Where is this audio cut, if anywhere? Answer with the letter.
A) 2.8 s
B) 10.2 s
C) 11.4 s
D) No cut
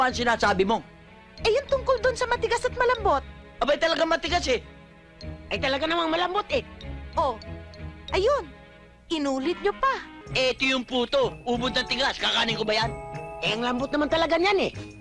B